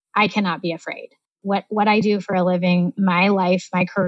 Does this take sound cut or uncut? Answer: cut